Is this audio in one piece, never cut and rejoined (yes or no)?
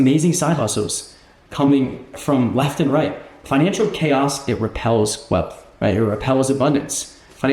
no